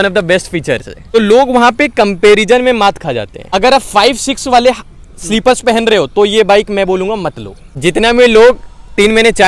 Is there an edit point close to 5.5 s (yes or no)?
no